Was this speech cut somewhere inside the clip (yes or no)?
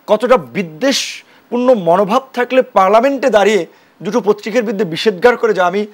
no